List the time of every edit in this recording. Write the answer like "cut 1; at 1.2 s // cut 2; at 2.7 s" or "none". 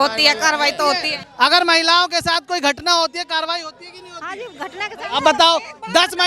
cut 1; at 1.2 s